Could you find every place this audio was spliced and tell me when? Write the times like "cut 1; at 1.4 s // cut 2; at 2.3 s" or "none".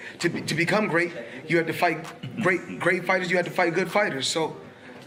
none